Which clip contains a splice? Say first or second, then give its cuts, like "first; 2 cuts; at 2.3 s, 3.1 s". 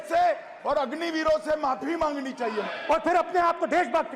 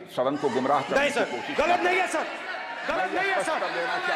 first; 1 cut; at 2.7 s